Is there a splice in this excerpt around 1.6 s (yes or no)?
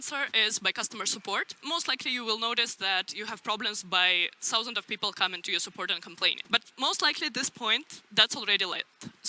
yes